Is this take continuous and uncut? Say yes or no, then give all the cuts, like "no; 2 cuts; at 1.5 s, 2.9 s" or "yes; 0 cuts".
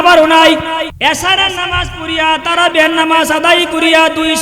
no; 1 cut; at 0.9 s